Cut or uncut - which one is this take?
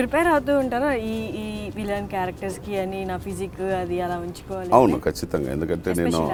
uncut